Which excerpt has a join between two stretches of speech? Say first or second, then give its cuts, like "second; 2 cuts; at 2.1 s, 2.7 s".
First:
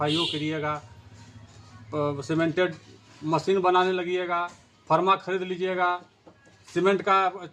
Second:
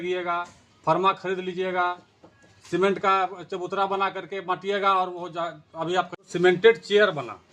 second; 1 cut; at 6.2 s